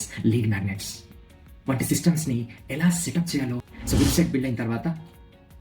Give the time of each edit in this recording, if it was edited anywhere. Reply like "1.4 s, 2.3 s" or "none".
3.7 s